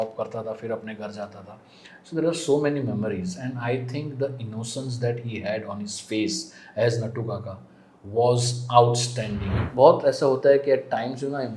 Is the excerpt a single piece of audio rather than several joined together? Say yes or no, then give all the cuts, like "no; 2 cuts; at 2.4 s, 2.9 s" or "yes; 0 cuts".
no; 1 cut; at 9.6 s